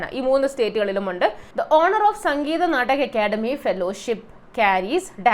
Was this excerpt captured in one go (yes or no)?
no